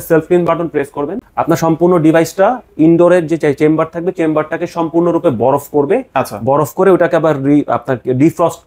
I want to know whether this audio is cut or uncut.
cut